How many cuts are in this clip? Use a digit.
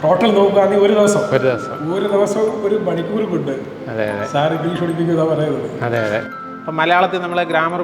1